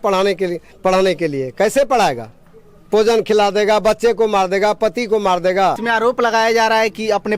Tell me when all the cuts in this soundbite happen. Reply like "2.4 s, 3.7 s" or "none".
5.8 s

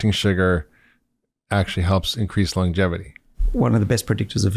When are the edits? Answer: 3.4 s

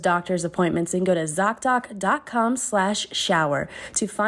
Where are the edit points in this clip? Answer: none

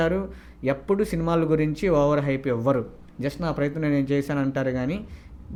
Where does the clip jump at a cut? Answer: none

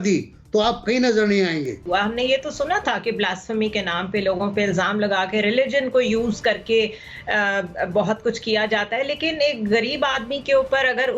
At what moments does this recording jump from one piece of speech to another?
1.7 s

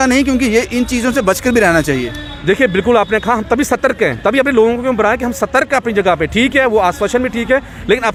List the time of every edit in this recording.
none

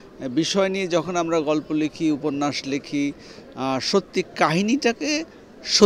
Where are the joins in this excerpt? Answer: none

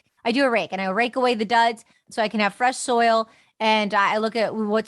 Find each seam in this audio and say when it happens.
2.0 s

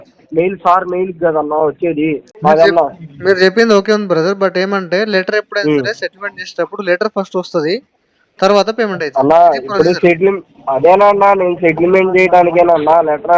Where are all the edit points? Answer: 2.3 s

